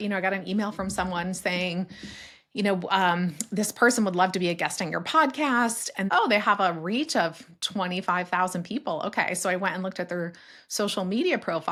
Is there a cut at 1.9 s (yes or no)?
no